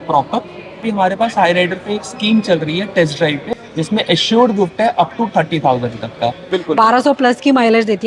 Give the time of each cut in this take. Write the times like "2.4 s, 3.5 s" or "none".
0.8 s, 3.6 s, 6.5 s